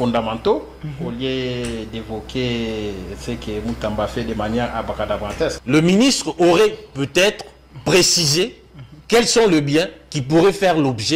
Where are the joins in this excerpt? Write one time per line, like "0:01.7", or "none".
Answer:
0:05.6